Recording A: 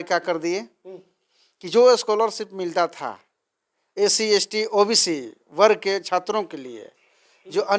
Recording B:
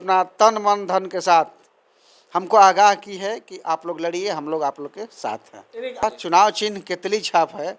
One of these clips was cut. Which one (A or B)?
B